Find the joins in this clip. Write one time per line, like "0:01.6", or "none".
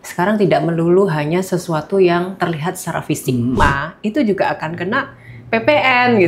0:03.6